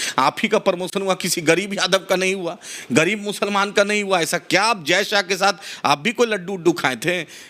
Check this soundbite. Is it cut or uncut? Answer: uncut